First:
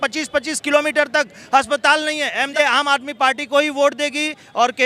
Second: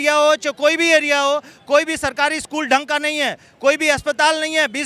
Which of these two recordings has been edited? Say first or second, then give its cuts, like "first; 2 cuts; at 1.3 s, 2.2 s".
first; 1 cut; at 2.5 s